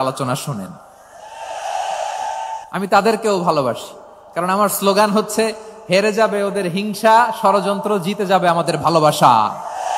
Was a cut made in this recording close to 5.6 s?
no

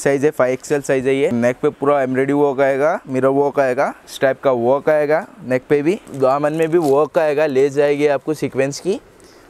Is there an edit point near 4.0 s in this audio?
yes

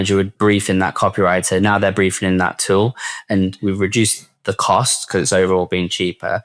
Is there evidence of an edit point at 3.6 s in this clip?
yes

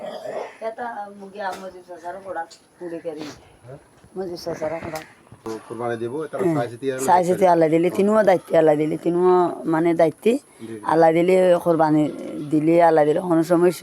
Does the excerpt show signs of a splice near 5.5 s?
yes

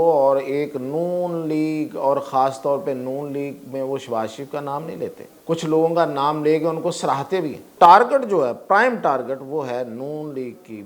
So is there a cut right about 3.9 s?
no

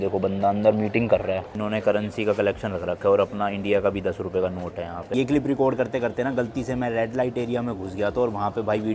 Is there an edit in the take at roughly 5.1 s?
yes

